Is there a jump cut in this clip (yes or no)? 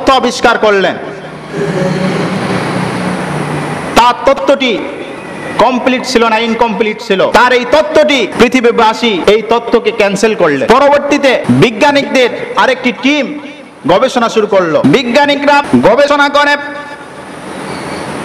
yes